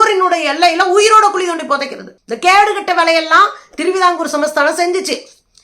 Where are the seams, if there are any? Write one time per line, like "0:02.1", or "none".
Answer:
none